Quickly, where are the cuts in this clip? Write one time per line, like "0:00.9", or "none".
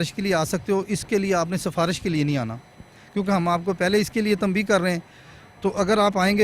none